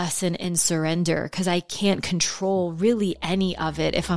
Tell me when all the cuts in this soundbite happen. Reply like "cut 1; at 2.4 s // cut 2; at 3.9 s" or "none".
none